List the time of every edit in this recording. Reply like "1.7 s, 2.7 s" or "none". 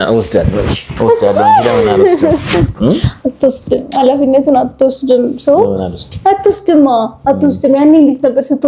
none